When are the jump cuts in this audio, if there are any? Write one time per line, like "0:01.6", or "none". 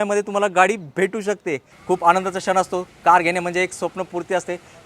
0:01.8